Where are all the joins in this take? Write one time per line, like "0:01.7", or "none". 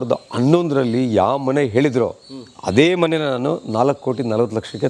none